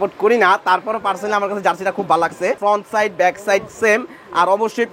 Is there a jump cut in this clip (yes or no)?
yes